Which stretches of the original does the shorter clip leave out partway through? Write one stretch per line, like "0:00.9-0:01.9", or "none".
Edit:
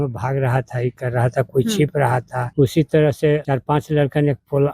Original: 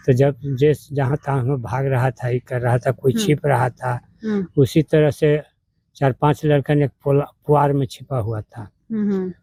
0:04.0-0:04.5
0:05.4-0:06.0